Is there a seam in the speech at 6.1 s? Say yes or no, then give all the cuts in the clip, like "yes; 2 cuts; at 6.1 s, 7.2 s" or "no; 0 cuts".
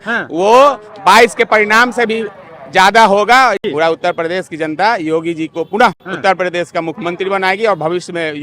yes; 2 cuts; at 3.6 s, 6.1 s